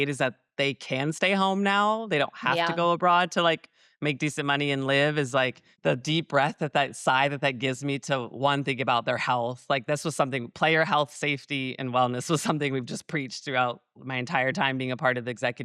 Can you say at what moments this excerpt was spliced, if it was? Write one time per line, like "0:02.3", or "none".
0:05.6